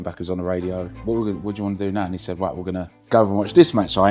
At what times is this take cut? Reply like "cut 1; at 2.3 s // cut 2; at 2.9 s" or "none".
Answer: cut 1; at 0.9 s // cut 2; at 2.9 s